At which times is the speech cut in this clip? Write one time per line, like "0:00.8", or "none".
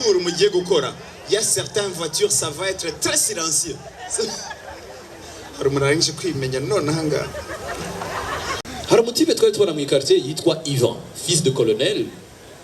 0:08.6